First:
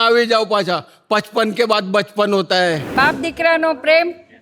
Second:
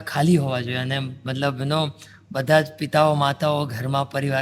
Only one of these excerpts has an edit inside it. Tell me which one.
first; 1 cut; at 2.8 s

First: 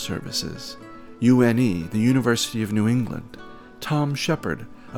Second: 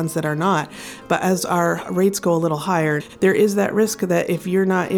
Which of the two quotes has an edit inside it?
second; 1 cut; at 3.1 s

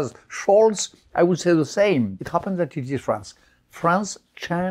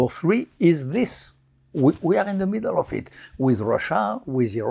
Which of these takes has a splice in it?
first; 1 cut; at 2.2 s

